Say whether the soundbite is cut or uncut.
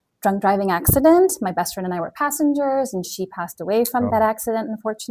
cut